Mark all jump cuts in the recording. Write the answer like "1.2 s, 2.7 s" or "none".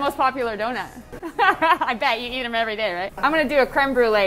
0.9 s, 3.1 s